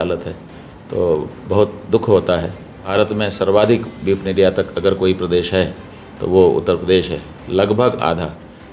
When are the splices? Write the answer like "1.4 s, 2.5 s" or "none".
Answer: 2.8 s